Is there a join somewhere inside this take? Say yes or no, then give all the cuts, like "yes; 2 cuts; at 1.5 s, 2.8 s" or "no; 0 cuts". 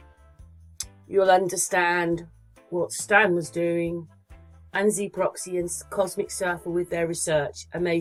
no; 0 cuts